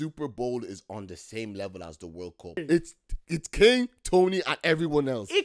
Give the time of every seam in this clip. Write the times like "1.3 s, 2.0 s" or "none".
2.6 s